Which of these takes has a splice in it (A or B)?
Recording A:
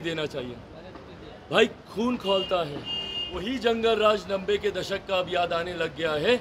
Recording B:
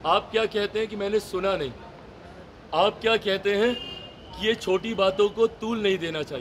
A